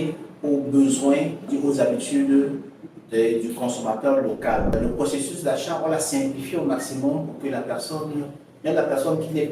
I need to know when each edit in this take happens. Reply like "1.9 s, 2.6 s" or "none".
1.5 s, 4.7 s